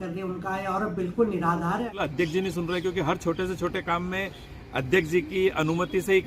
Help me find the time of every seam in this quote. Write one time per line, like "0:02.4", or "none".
0:01.9

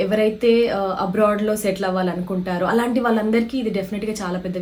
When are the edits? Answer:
none

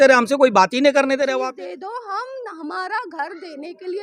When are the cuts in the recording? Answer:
0:01.3

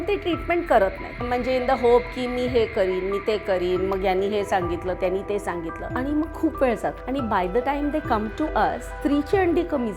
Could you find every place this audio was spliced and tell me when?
0:01.2
0:05.8
0:07.0
0:08.9

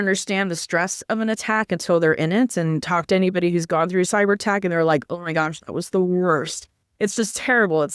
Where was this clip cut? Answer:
none

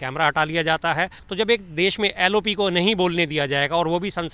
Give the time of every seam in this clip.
0:01.2

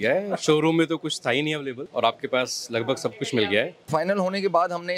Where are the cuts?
0:01.8
0:03.9

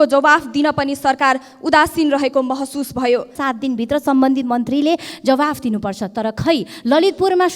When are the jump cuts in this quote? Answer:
0:03.3

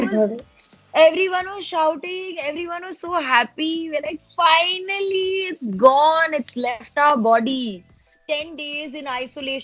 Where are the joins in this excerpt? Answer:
0:08.1

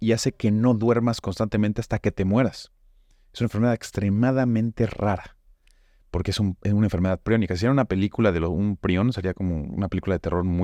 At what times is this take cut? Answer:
none

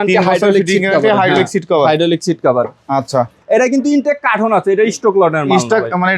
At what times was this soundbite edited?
0:03.4

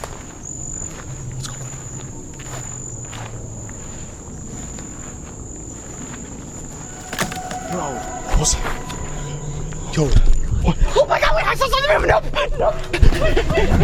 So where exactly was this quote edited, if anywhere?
none

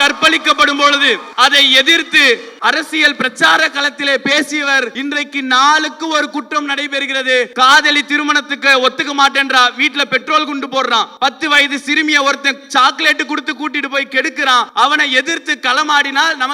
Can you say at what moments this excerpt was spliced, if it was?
0:01.3
0:02.5
0:04.9
0:07.5
0:11.1
0:14.7

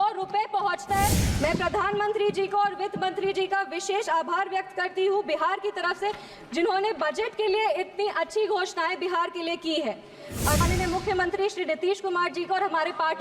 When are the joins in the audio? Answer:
0:01.2
0:10.6

